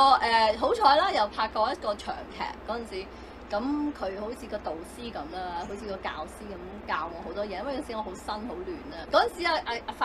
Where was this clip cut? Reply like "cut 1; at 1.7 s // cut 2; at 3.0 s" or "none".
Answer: cut 1; at 9.0 s